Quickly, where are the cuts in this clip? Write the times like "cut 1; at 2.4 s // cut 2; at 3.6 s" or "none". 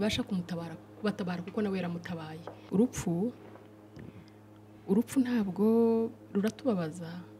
cut 1; at 2.6 s